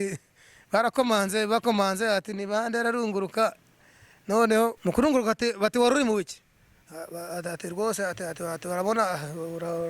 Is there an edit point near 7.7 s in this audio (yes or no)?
no